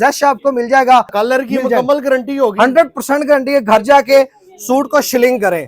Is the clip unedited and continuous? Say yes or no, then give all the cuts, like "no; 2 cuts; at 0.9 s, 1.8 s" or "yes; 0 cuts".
no; 1 cut; at 1.1 s